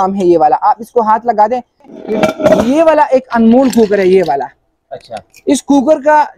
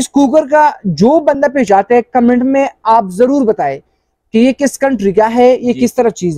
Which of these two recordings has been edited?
first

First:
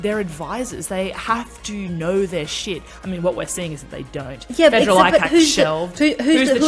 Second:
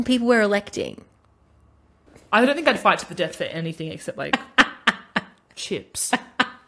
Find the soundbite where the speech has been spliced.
second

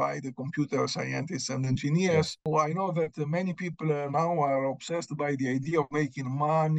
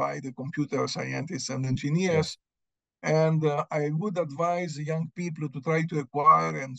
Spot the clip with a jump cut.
first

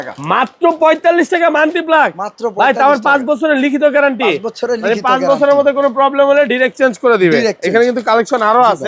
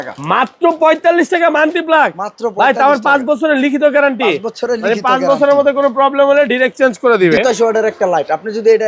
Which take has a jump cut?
second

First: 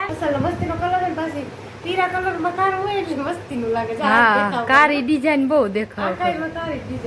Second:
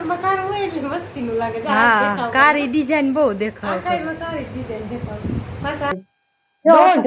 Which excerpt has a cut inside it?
second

